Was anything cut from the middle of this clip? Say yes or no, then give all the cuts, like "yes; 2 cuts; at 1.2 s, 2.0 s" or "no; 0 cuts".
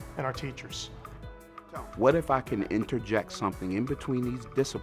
yes; 1 cut; at 1.5 s